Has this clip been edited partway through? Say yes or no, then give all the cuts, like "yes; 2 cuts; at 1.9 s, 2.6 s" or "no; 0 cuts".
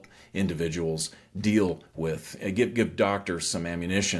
no; 0 cuts